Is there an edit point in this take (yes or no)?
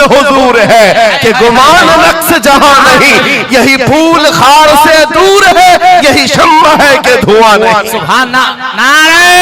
no